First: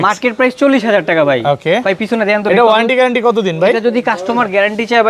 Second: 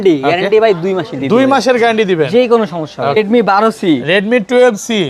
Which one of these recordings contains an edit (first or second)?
second